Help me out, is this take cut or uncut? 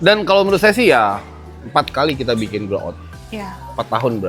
uncut